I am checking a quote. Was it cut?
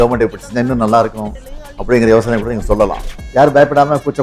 no; 0 cuts

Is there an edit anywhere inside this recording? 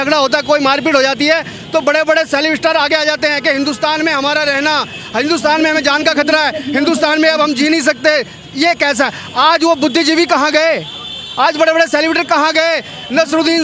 no; 0 cuts

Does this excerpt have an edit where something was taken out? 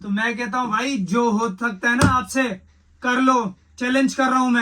no; 0 cuts

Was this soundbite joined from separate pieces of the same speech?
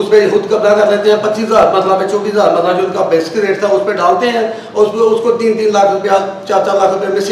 no; 0 cuts

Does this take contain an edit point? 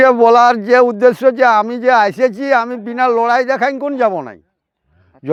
no; 0 cuts

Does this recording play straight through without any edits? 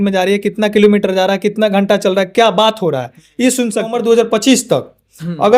no; 1 cut; at 3.9 s

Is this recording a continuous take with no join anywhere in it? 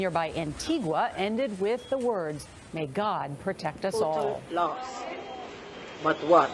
no; 1 cut; at 4.4 s

